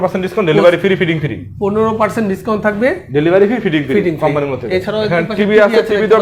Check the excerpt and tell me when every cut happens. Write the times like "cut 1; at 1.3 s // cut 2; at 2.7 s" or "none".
none